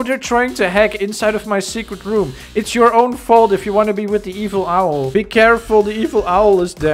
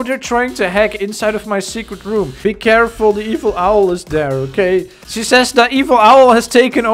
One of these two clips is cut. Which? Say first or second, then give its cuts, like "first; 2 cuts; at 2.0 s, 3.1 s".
second; 2 cuts; at 2.4 s, 5.0 s